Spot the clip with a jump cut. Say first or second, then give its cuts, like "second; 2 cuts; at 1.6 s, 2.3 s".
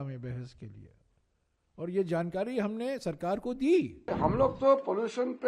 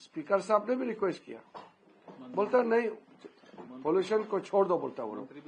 first; 1 cut; at 4.0 s